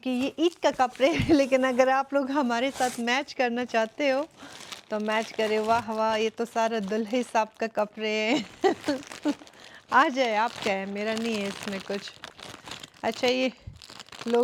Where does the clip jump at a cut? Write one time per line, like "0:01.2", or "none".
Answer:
none